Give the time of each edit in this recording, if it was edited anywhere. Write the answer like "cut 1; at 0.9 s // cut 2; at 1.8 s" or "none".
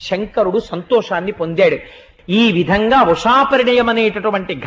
cut 1; at 2.1 s